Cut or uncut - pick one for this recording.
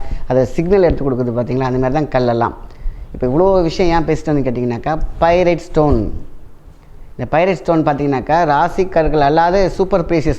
uncut